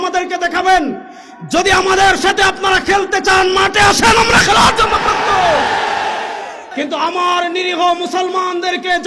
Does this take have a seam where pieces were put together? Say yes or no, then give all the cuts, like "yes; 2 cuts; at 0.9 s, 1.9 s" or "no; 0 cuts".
yes; 1 cut; at 6.6 s